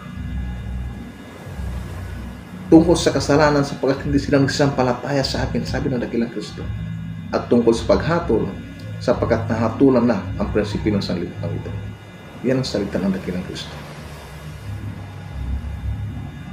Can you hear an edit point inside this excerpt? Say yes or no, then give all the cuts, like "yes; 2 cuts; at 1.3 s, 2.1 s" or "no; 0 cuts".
no; 0 cuts